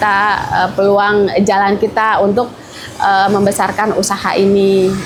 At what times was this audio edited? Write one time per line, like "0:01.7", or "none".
none